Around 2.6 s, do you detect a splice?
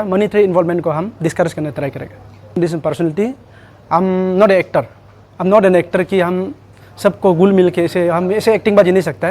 yes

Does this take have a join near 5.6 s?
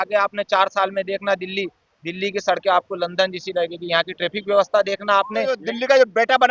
yes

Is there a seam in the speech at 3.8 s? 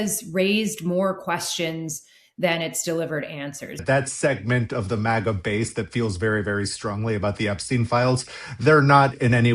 yes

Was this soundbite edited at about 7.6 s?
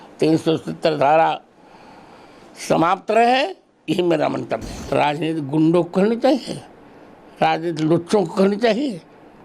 no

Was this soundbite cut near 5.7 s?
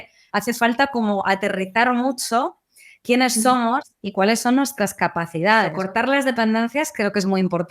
yes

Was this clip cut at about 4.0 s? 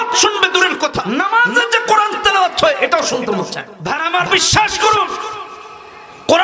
yes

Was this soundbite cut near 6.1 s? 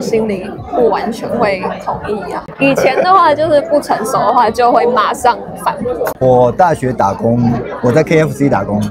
yes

